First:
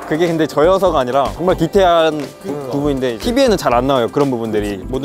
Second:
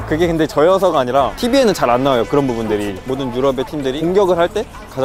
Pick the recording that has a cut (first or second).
second